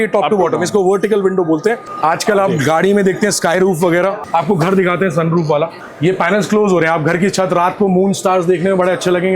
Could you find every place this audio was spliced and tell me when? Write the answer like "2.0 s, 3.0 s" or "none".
1.9 s, 4.2 s, 5.8 s